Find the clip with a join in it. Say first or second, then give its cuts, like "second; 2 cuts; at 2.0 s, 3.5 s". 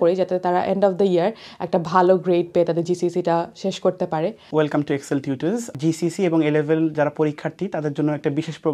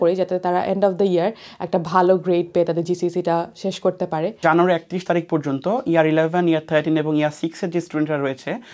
second; 1 cut; at 4.4 s